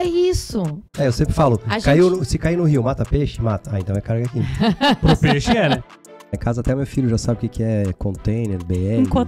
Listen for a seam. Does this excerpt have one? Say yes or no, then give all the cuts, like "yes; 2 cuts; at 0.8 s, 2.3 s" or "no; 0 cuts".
yes; 2 cuts; at 0.8 s, 5.9 s